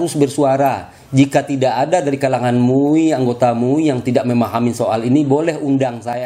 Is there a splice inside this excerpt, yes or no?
no